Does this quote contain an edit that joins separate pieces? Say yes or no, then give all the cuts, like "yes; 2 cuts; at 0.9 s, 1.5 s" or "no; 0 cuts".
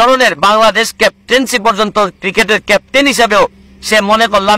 no; 0 cuts